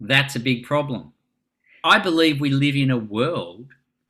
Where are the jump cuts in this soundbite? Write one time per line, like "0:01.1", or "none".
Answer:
0:01.8